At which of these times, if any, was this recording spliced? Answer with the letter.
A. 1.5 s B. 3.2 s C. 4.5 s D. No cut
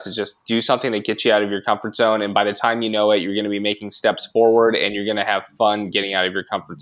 D